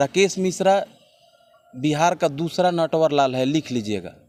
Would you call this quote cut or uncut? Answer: uncut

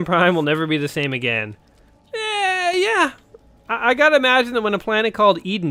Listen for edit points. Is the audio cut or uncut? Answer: uncut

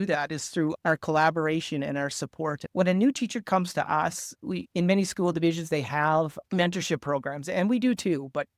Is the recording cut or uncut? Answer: cut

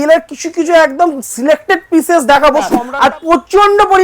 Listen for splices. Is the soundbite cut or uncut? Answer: cut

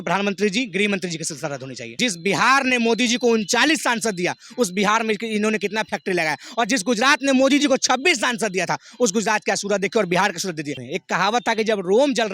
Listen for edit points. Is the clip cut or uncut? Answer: cut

